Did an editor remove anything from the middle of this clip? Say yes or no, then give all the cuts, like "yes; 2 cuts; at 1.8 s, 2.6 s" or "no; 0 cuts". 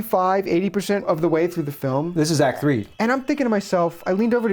yes; 2 cuts; at 1.1 s, 2.9 s